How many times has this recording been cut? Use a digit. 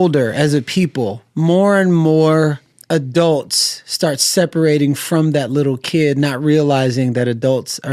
2